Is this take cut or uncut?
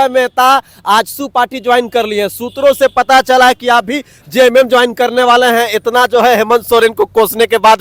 uncut